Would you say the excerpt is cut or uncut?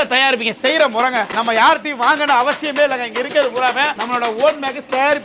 uncut